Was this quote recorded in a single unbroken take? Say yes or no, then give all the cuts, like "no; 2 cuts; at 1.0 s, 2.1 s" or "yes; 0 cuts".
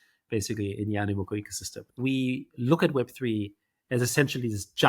no; 1 cut; at 1.8 s